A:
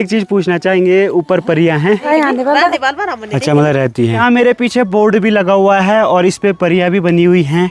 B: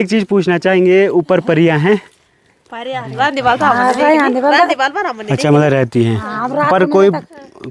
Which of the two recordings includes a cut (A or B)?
A